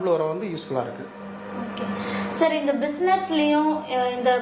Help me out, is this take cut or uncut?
uncut